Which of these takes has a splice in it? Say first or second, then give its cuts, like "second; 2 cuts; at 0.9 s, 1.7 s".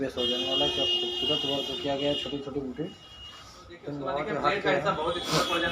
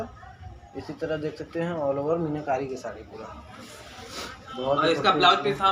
first; 1 cut; at 4.0 s